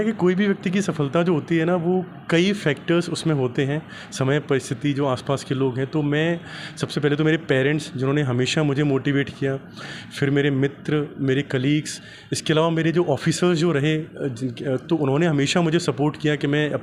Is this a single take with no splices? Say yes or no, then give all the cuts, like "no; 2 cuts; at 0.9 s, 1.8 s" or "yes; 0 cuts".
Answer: yes; 0 cuts